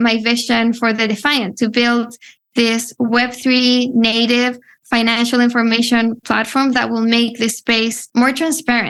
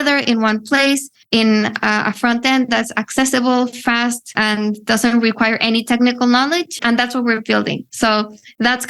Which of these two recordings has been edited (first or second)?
second